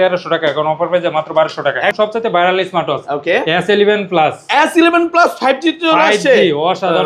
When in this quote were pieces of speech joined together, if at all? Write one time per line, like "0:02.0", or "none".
0:01.9